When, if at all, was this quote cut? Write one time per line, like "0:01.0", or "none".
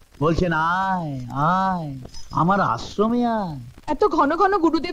0:03.6